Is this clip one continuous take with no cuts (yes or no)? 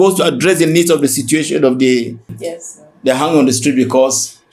no